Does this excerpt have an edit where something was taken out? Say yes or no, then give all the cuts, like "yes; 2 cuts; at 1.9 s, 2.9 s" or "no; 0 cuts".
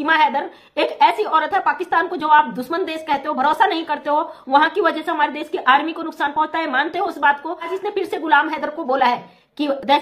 yes; 1 cut; at 7.7 s